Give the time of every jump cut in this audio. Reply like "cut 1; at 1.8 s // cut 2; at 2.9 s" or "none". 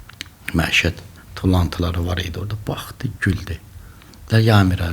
cut 1; at 3.2 s